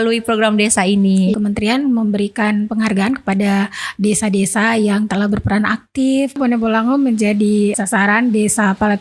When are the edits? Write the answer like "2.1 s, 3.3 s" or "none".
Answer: 1.3 s, 6.4 s, 7.7 s